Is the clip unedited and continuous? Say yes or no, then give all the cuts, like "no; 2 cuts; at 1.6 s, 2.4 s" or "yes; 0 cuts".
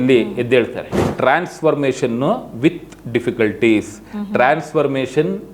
no; 1 cut; at 1.1 s